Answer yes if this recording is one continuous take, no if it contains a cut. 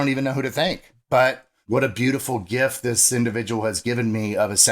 no